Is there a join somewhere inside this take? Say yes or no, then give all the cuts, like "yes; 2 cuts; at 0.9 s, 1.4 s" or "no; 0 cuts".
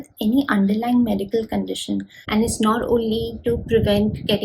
yes; 1 cut; at 2.1 s